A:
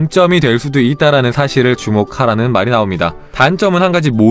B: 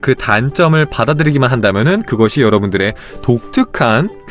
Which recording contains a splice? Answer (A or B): A